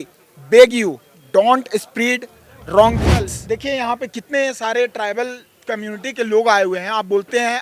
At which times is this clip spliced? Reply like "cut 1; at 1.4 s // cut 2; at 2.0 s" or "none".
cut 1; at 3.4 s

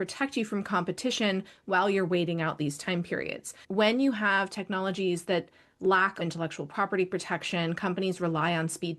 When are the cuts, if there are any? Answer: cut 1; at 3.6 s // cut 2; at 6.2 s

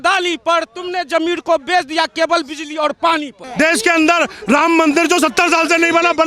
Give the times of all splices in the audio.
cut 1; at 3.4 s

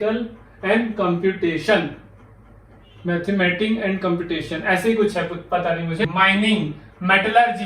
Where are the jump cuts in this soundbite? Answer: cut 1; at 6.1 s

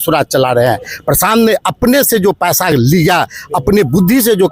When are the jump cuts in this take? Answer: none

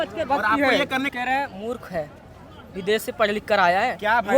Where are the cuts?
cut 1; at 1.1 s

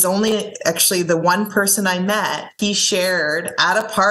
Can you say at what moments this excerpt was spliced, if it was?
cut 1; at 2.5 s

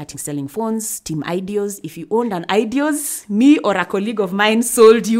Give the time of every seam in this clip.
none

